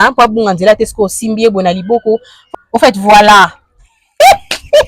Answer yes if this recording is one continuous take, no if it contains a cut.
no